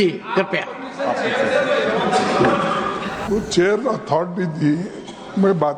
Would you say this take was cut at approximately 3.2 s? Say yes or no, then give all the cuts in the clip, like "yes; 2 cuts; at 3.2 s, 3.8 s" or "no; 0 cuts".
yes; 1 cut; at 3.2 s